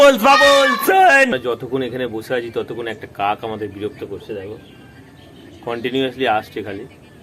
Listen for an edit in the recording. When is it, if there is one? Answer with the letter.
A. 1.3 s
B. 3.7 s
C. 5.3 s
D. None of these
A